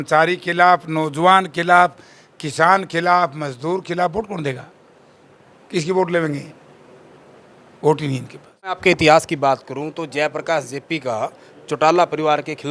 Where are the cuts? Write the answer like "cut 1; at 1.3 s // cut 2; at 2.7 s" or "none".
cut 1; at 8.8 s

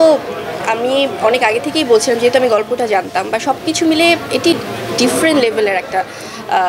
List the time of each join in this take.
none

